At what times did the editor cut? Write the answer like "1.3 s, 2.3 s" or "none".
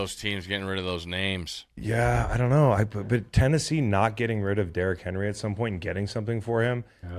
none